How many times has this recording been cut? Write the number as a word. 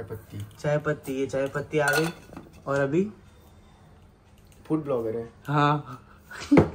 zero